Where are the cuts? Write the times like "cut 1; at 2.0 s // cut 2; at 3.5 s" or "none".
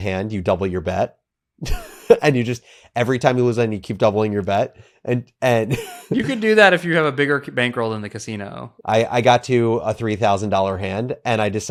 none